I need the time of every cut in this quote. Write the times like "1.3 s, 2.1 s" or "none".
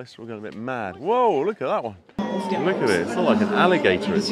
2.2 s